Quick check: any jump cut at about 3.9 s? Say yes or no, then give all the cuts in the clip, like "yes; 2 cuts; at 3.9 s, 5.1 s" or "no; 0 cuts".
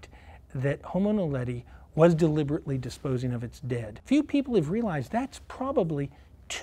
yes; 1 cut; at 3.9 s